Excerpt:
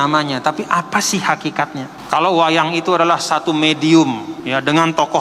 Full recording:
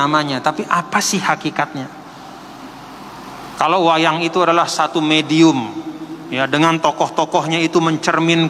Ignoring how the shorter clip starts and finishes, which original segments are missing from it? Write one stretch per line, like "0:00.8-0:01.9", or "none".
0:01.9-0:03.4
0:05.8-0:06.2